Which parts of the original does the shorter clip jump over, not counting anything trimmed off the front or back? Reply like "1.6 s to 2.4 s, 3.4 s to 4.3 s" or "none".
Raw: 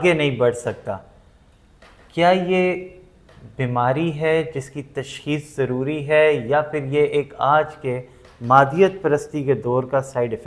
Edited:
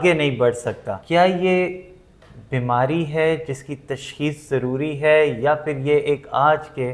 0.9 s to 2.0 s